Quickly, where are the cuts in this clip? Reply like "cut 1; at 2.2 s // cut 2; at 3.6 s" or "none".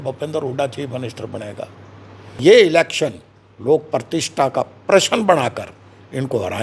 cut 1; at 2.4 s